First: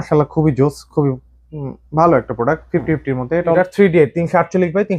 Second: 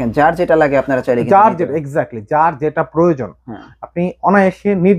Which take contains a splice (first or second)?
first